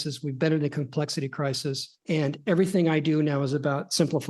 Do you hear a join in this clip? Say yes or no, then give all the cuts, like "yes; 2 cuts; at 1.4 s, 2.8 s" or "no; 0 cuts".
yes; 1 cut; at 1.9 s